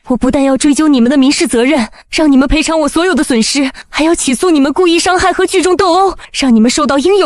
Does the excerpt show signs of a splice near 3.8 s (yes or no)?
yes